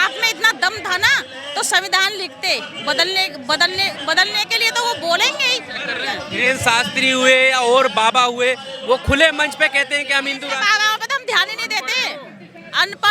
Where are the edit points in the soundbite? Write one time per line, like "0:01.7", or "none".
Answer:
0:05.9